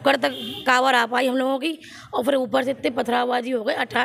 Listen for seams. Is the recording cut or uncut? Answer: uncut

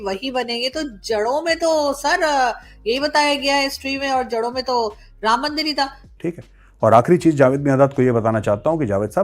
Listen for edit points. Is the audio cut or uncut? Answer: cut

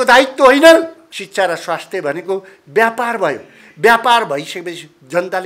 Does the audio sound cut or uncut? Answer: cut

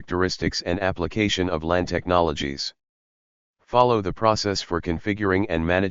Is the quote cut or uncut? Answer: cut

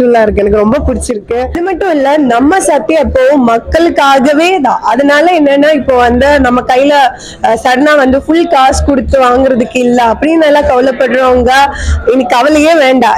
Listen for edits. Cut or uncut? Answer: cut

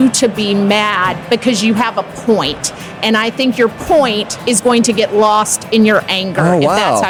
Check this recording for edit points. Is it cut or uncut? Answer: uncut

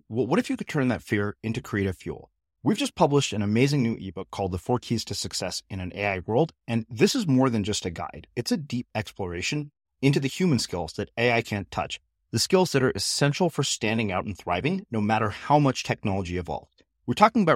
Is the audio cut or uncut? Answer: uncut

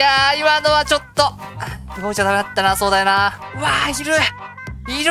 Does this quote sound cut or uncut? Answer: cut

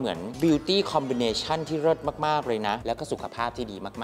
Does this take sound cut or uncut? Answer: uncut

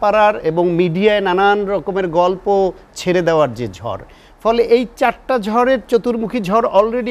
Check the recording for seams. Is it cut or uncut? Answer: uncut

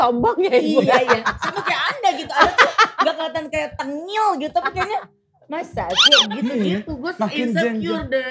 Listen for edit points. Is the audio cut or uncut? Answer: uncut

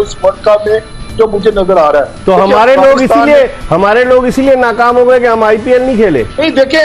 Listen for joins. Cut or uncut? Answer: uncut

